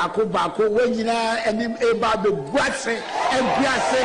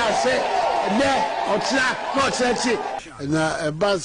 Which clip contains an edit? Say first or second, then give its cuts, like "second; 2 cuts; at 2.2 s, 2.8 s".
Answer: second; 1 cut; at 2.9 s